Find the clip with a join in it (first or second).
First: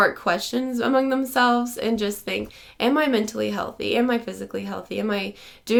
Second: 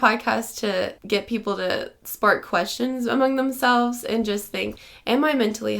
second